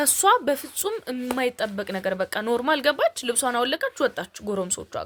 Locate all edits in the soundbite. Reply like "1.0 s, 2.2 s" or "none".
none